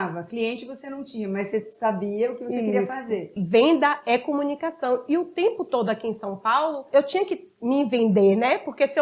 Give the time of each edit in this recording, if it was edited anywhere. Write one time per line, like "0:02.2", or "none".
0:03.3
0:06.8